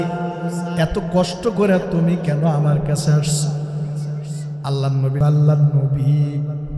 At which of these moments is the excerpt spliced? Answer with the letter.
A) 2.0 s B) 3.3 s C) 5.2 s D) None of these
C